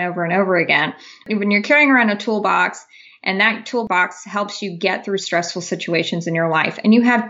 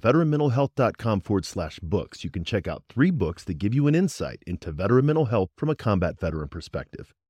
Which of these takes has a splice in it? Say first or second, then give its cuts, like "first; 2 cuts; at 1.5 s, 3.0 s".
first; 2 cuts; at 1.2 s, 3.9 s